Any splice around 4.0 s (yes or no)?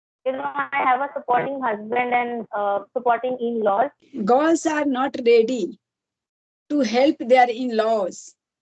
yes